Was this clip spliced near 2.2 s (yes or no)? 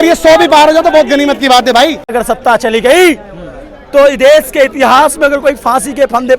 yes